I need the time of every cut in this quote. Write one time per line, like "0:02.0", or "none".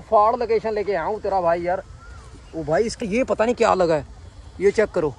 0:03.0